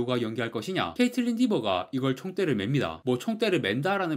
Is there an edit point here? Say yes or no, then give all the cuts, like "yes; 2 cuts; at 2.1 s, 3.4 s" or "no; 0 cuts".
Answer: yes; 1 cut; at 0.9 s